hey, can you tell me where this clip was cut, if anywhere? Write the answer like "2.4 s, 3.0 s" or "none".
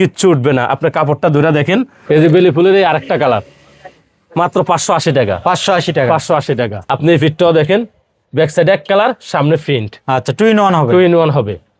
2.0 s, 6.8 s